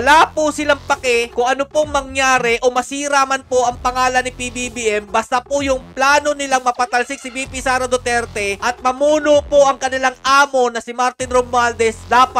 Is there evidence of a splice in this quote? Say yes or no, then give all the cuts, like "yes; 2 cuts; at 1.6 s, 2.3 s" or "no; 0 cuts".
no; 0 cuts